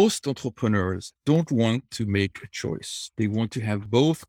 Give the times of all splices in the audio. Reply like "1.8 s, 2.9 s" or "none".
1.1 s